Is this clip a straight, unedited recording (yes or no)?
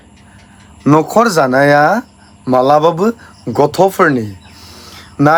yes